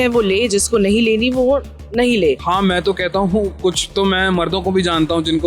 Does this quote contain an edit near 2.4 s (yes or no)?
yes